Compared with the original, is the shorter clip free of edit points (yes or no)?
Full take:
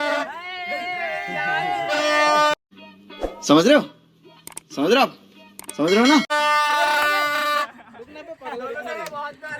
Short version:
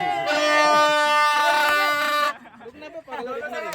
no